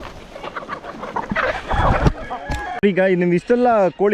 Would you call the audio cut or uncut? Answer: cut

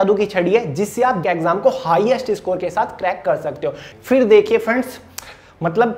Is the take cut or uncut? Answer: cut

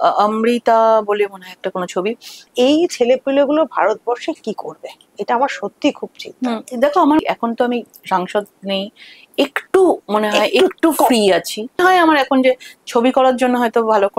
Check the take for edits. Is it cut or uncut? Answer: cut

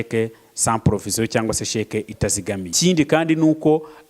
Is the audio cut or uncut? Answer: cut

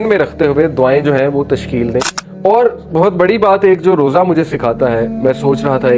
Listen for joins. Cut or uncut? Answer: cut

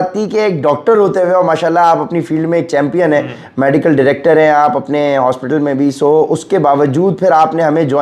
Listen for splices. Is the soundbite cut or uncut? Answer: uncut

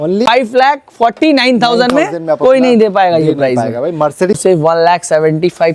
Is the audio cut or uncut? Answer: cut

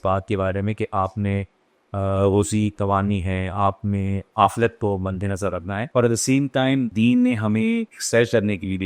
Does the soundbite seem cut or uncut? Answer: cut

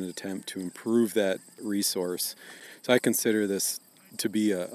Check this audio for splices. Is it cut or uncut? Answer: cut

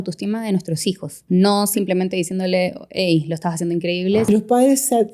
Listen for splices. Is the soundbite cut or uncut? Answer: cut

